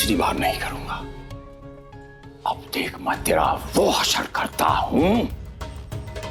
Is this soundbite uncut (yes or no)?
yes